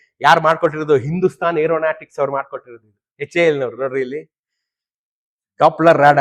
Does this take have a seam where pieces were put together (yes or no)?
no